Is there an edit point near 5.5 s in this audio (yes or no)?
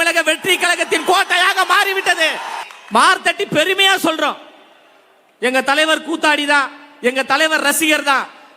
no